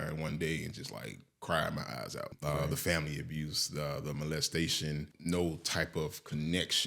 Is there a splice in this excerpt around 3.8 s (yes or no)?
no